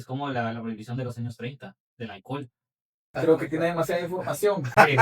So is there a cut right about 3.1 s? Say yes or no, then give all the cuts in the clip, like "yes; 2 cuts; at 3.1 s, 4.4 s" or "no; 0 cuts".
yes; 1 cut; at 3.1 s